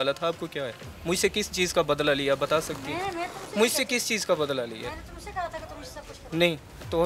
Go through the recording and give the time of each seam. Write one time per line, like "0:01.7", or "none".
none